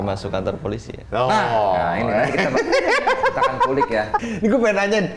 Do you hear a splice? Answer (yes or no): yes